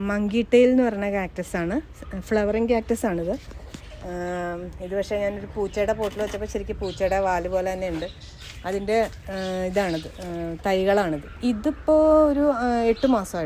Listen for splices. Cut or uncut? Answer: uncut